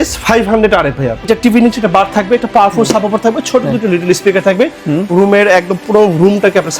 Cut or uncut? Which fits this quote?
cut